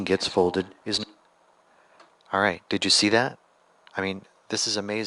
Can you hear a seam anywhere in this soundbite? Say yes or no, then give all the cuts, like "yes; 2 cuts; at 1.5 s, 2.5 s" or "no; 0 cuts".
no; 0 cuts